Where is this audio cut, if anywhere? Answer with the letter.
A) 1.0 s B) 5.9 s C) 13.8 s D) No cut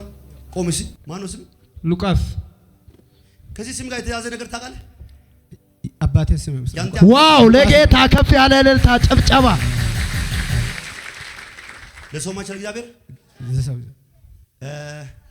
A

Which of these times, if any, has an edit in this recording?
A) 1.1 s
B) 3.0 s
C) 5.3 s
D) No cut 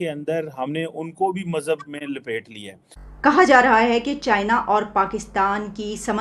B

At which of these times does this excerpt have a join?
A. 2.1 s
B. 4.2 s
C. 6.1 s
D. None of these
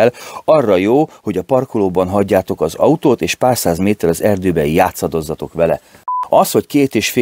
C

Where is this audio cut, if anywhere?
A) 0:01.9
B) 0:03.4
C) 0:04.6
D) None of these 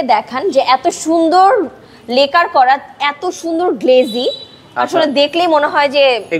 D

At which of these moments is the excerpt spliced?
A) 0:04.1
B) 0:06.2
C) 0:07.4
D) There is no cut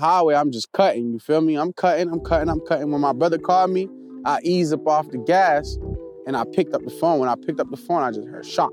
D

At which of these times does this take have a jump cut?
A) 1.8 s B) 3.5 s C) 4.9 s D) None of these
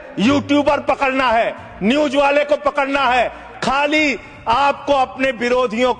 B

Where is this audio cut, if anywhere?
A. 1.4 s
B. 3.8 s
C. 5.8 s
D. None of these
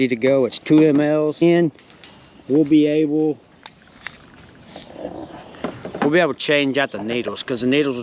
A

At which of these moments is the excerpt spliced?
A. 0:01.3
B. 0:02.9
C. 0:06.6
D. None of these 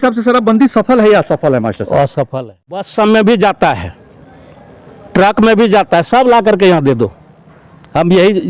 B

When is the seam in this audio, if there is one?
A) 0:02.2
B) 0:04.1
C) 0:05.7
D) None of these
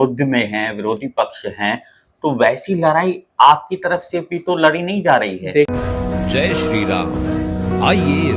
C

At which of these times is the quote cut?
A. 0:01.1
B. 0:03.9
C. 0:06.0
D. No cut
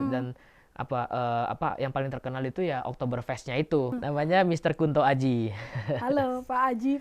B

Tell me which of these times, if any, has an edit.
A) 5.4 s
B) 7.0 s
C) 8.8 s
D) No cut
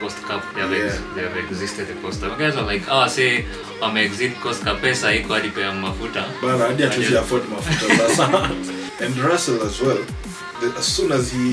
C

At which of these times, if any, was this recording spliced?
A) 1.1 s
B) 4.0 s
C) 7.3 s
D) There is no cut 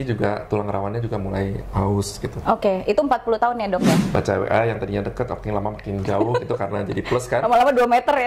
B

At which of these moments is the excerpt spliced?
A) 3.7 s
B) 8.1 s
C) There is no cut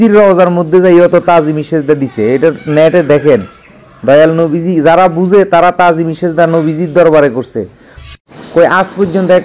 B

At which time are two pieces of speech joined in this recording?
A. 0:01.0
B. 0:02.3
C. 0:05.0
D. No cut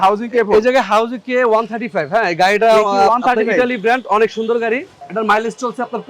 C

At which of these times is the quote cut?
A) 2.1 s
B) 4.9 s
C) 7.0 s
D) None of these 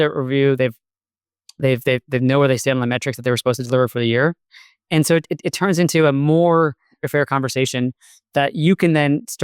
C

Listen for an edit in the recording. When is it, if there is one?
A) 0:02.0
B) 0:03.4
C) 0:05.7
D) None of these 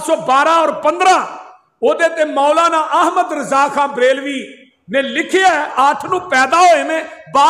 C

